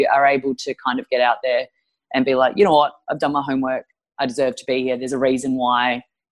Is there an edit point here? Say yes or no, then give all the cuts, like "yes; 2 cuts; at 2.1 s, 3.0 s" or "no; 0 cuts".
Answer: no; 0 cuts